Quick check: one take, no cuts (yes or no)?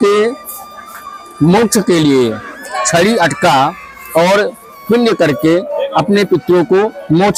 yes